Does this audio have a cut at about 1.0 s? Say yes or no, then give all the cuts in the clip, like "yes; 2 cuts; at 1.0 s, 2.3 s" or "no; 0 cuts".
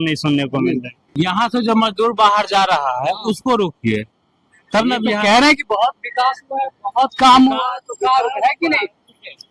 yes; 1 cut; at 1.0 s